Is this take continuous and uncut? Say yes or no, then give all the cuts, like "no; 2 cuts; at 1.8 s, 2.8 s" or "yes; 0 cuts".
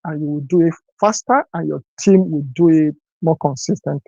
no; 1 cut; at 3.1 s